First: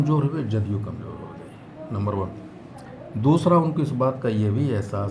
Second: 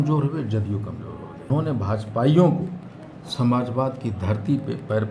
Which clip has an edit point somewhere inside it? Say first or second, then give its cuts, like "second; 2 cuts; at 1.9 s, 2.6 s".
second; 1 cut; at 1.5 s